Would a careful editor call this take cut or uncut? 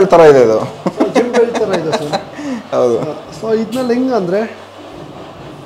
uncut